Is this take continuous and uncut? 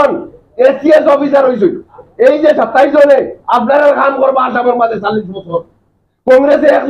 no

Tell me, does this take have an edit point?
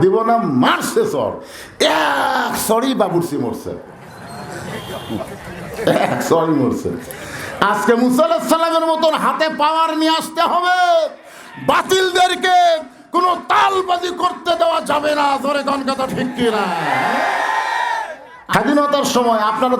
yes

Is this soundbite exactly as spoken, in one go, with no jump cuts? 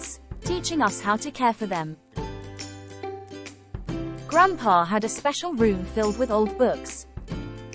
no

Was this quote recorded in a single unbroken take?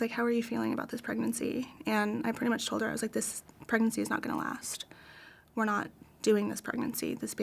yes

